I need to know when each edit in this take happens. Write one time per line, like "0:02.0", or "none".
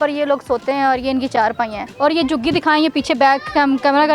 0:01.8